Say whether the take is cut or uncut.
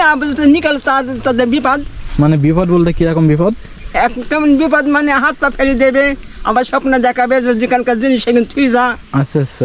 uncut